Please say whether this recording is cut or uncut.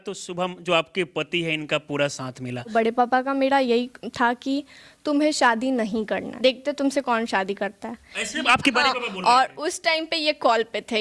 cut